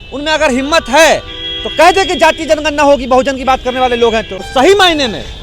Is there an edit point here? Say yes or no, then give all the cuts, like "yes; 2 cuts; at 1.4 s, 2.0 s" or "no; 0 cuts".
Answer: yes; 1 cut; at 4.5 s